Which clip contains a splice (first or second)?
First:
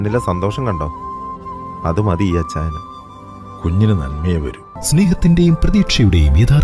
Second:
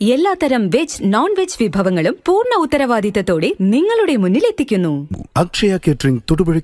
second